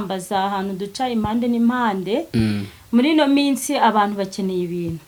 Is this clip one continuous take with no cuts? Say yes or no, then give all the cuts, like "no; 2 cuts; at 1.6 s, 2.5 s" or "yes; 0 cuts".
yes; 0 cuts